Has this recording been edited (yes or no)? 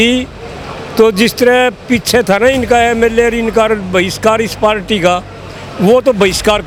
no